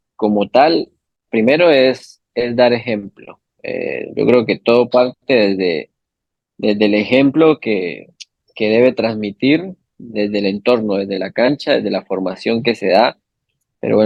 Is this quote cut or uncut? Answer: uncut